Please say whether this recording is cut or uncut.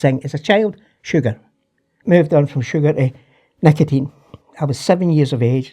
cut